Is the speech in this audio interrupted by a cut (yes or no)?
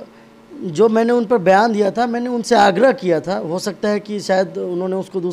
no